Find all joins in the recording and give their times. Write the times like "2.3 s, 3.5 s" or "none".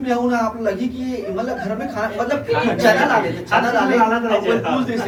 none